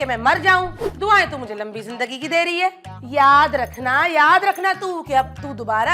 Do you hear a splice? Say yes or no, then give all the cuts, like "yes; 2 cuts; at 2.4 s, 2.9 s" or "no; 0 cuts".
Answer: no; 0 cuts